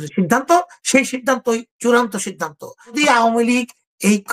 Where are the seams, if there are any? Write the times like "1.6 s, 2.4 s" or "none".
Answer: 3.0 s